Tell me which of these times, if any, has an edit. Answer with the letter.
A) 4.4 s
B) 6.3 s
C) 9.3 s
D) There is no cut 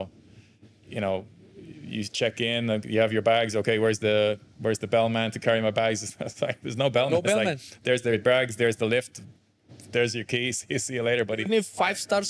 D